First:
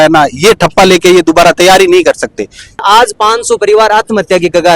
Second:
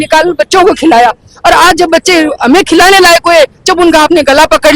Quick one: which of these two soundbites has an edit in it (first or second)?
first